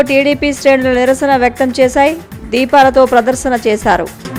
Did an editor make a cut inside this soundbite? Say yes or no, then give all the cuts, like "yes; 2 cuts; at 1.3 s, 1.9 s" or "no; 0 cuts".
no; 0 cuts